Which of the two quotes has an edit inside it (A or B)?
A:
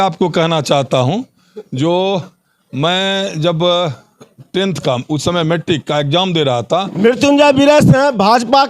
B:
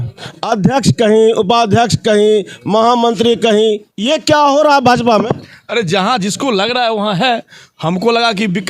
A